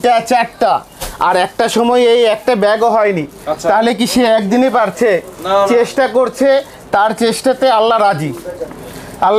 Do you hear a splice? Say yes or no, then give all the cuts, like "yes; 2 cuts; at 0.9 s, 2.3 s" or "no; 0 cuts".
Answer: no; 0 cuts